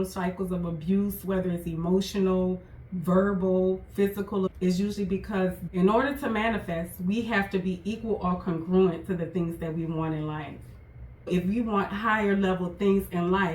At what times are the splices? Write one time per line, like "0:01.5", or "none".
0:04.5
0:05.6
0:11.3

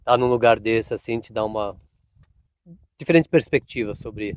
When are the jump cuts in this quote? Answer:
none

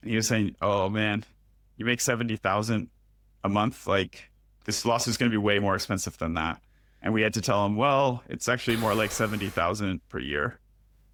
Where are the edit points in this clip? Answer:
none

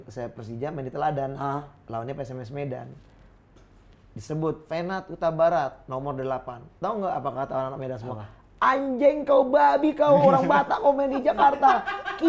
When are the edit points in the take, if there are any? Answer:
none

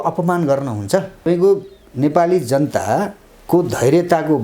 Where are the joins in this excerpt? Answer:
0:01.1

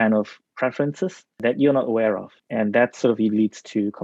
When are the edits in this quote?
0:01.4
0:02.3

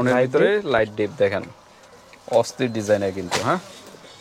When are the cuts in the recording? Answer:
none

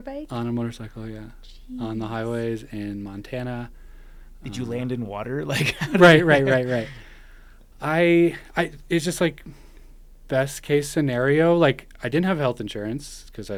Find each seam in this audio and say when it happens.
none

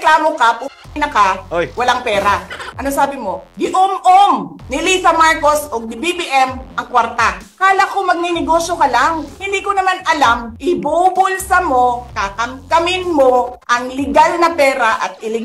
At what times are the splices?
0:02.7
0:07.4
0:09.3
0:10.5

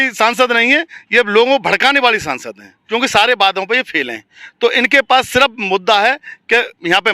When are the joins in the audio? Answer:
0:02.7

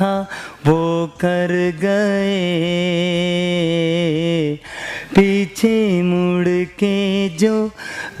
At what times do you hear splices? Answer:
none

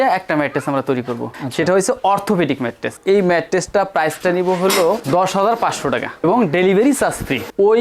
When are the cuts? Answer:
none

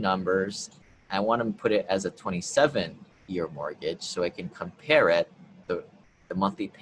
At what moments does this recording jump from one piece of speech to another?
none

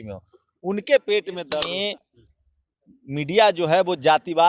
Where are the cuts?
0:01.6

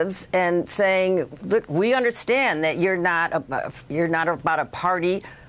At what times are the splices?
0:01.5

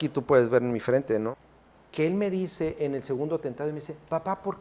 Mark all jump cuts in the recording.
0:01.3

